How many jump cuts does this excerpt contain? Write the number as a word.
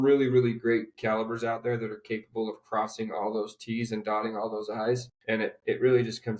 one